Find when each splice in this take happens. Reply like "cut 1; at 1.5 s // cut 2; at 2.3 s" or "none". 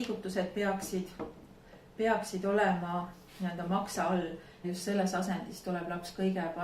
cut 1; at 4.6 s